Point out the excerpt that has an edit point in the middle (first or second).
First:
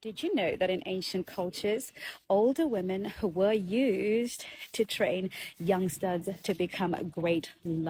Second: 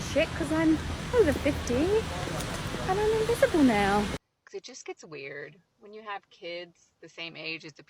second